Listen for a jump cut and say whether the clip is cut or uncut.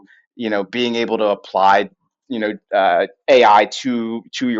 uncut